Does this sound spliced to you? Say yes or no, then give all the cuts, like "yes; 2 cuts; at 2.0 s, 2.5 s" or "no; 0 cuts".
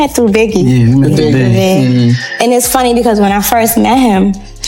no; 0 cuts